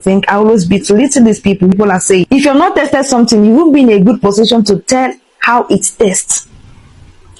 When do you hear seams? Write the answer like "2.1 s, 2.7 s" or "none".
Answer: 1.7 s